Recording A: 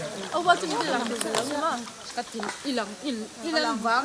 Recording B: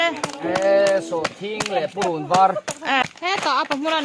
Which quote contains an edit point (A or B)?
B